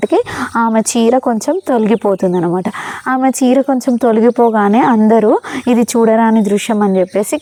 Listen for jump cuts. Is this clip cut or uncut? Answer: uncut